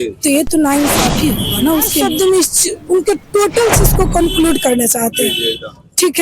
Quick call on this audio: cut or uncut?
cut